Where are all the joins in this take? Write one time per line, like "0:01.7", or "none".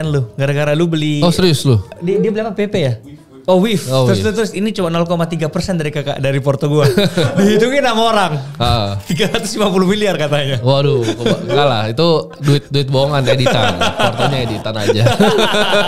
0:01.9